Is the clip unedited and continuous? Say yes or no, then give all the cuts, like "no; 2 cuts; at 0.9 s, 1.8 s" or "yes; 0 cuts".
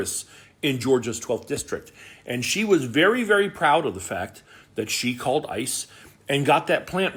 yes; 0 cuts